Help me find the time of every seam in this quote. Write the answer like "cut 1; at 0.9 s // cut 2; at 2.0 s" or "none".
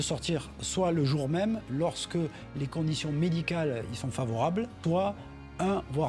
cut 1; at 4.8 s

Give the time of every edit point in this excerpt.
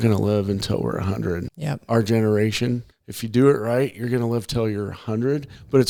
none

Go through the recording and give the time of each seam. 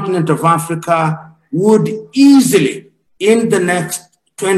none

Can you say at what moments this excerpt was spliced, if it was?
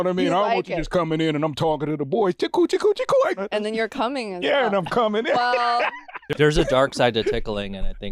cut 1; at 3.4 s // cut 2; at 6.3 s

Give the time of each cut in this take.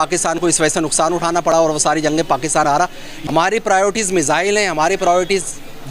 cut 1; at 3.1 s

